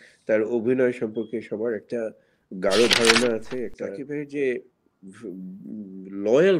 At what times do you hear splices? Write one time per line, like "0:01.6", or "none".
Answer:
0:03.9